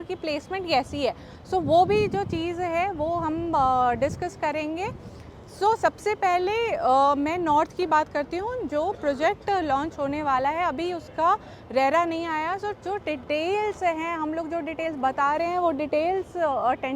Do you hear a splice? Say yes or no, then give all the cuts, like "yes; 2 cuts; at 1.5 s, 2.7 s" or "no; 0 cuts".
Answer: no; 0 cuts